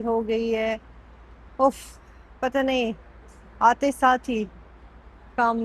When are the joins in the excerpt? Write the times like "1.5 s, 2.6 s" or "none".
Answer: none